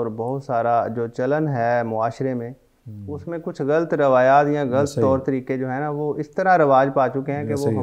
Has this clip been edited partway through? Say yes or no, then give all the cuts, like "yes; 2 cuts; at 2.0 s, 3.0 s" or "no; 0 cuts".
no; 0 cuts